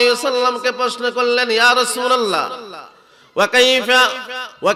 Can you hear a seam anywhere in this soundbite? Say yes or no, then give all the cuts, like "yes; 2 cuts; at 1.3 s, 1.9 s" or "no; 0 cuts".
no; 0 cuts